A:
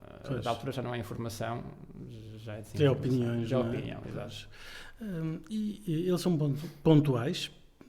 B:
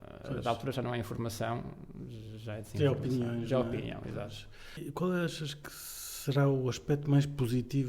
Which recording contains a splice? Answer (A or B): B